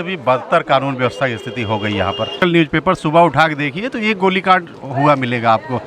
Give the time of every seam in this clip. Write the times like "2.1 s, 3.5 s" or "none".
2.4 s